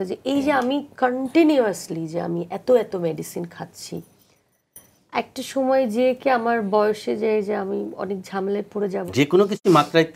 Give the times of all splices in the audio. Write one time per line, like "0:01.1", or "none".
0:09.0